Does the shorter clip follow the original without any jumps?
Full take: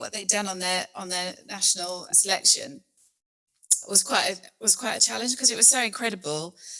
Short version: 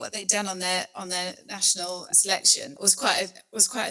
no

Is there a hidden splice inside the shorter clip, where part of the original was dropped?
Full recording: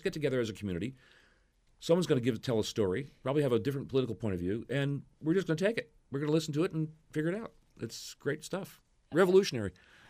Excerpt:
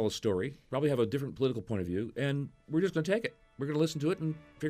no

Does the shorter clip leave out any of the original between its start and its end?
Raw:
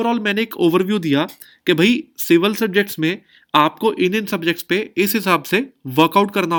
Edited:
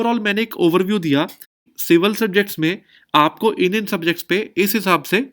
yes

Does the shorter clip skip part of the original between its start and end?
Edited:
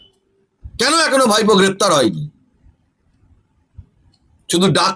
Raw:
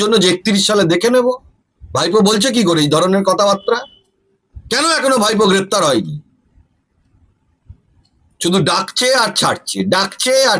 no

